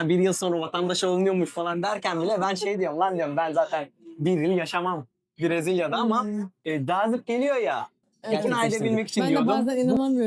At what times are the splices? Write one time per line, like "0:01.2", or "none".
0:09.3